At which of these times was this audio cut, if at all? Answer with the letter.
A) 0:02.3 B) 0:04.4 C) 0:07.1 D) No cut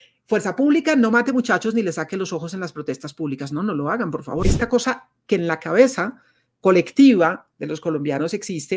B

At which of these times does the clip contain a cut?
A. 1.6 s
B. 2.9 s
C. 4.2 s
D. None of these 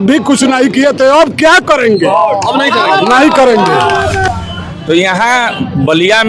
C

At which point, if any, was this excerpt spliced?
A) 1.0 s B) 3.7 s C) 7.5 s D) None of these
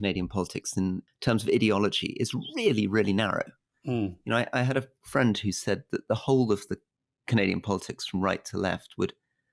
A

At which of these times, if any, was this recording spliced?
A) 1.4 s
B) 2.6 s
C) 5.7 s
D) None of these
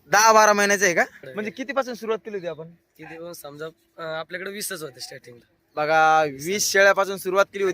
A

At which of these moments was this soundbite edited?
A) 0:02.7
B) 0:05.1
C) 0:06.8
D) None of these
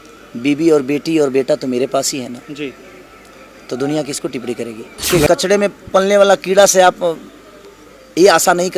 B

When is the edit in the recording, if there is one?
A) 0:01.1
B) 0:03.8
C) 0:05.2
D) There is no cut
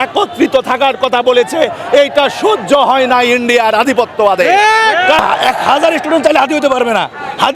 C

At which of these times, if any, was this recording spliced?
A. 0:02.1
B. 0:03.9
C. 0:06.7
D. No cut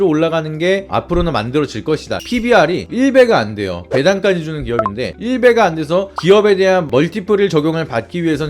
A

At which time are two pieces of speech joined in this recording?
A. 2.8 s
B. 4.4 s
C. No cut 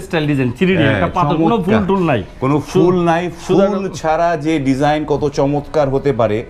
C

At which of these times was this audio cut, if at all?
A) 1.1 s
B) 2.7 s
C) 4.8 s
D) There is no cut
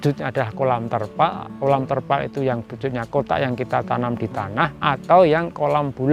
D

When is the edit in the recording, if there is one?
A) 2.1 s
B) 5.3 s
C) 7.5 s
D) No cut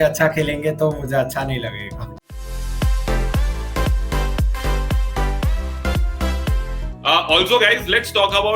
D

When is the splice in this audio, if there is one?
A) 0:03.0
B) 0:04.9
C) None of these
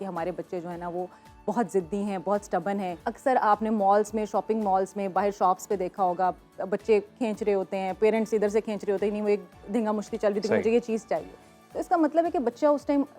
A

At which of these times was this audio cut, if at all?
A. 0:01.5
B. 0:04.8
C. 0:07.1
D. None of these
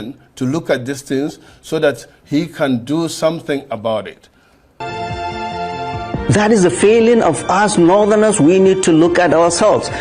B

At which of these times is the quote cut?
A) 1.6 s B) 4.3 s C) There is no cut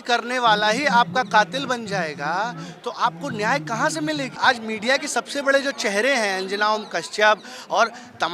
B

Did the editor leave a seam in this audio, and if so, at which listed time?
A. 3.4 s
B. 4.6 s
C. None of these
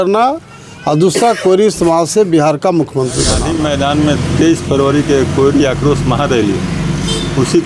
A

